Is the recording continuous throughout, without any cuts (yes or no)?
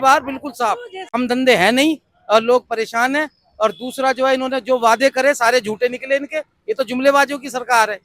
no